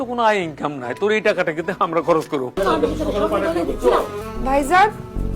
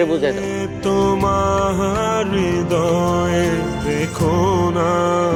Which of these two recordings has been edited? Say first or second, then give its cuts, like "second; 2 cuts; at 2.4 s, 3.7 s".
first; 2 cuts; at 2.5 s, 4.2 s